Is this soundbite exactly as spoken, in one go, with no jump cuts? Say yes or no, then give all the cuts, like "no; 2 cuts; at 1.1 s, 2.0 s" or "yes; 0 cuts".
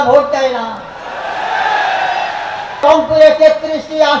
no; 1 cut; at 2.8 s